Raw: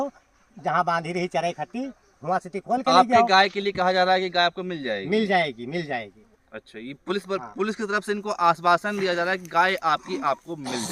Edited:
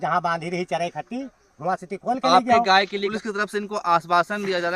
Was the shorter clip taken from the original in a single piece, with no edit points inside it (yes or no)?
no